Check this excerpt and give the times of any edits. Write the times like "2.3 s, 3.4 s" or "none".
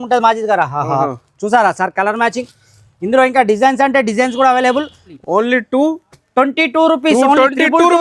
5.1 s